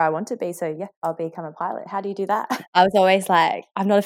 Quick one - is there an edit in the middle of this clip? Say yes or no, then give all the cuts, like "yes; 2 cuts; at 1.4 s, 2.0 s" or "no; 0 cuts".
yes; 2 cuts; at 0.9 s, 2.5 s